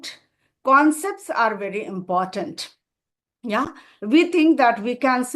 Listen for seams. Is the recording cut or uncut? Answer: uncut